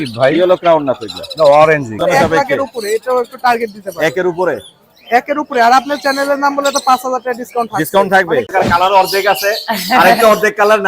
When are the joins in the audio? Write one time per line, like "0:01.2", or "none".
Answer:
0:02.0
0:08.5